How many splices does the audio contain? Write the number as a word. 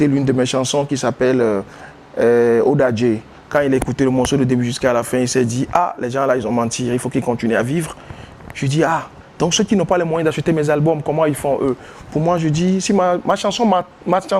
zero